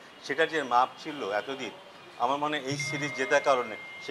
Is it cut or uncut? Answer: uncut